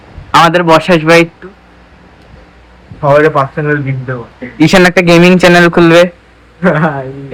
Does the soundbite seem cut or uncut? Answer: uncut